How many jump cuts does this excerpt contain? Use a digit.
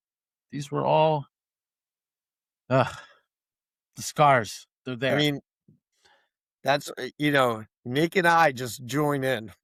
0